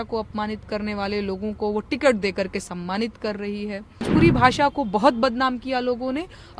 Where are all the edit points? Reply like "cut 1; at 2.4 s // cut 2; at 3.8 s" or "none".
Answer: cut 1; at 4.1 s